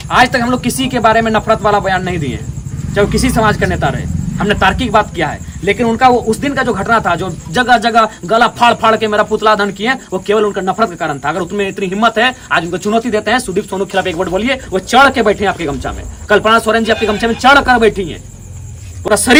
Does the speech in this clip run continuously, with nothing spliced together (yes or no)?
yes